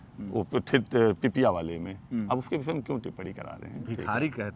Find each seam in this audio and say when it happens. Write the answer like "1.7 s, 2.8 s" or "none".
none